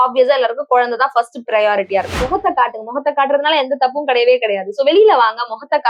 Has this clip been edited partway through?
yes; 1 cut; at 2.2 s

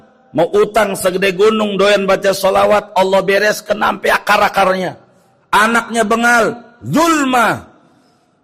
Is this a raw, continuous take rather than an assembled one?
yes; 0 cuts

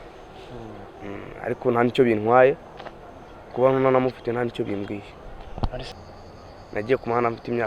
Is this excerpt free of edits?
no; 1 cut; at 5.9 s

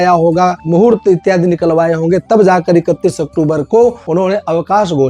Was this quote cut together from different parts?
yes; 1 cut; at 4.0 s

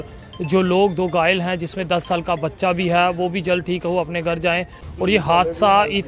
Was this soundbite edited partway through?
yes; 1 cut; at 4.8 s

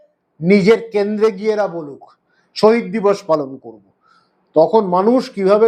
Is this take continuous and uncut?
yes; 0 cuts

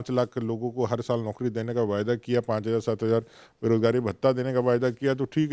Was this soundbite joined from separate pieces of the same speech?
no; 0 cuts

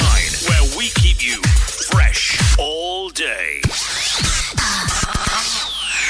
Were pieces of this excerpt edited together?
no; 0 cuts

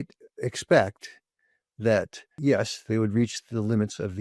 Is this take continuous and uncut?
no; 1 cut; at 2.2 s

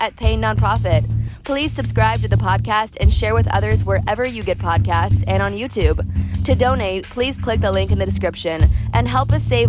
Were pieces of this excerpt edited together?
no; 0 cuts

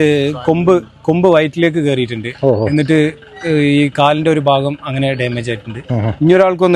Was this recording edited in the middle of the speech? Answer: no; 0 cuts

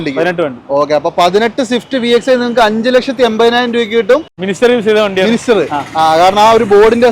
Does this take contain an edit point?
yes; 1 cut; at 4.4 s

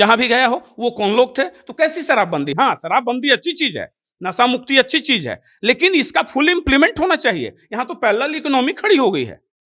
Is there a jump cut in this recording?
no; 0 cuts

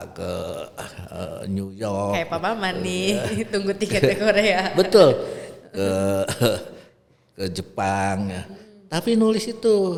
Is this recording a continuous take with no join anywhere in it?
yes; 0 cuts

